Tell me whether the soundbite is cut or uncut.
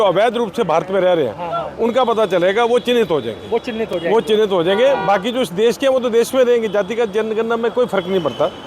uncut